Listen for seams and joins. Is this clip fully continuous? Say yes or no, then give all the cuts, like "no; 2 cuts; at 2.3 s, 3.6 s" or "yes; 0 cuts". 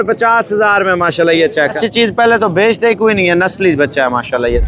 no; 1 cut; at 1.8 s